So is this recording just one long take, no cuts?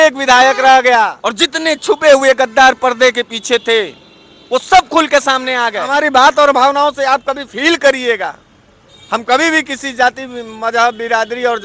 no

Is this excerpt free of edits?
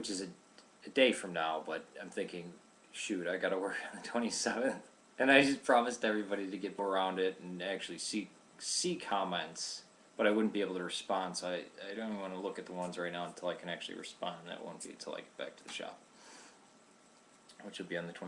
yes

